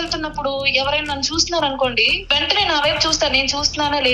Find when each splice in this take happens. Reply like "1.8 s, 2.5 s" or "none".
2.1 s